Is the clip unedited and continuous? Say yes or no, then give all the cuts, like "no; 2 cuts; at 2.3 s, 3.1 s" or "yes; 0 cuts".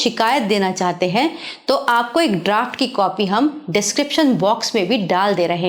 yes; 0 cuts